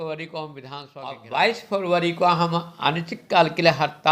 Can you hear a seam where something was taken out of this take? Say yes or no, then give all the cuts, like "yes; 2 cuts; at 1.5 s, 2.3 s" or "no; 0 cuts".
yes; 1 cut; at 1.2 s